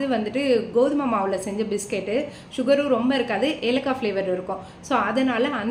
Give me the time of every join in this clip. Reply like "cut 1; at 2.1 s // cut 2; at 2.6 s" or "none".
none